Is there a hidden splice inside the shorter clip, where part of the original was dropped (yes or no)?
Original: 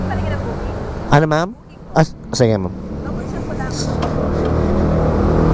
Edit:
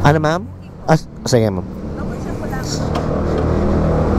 no